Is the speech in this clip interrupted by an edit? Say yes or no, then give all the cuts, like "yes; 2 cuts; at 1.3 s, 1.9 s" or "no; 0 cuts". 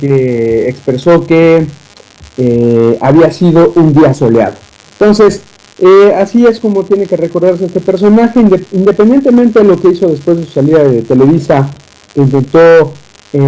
no; 0 cuts